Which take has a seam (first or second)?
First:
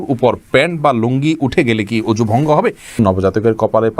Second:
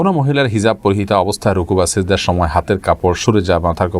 first